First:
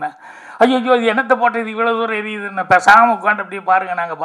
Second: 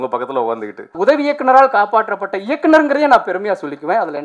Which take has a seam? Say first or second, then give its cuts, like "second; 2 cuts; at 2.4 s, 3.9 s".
second; 1 cut; at 0.9 s